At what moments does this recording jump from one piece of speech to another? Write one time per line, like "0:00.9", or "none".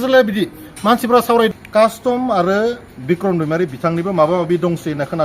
0:01.6